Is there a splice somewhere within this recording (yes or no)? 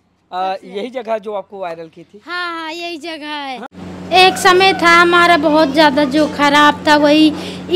yes